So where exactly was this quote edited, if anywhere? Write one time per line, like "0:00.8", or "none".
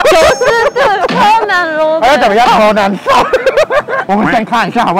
0:02.5